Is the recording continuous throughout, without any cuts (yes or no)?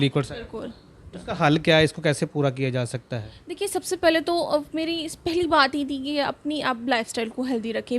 yes